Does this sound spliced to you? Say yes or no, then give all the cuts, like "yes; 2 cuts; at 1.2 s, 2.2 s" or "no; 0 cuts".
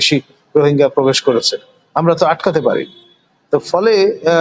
no; 0 cuts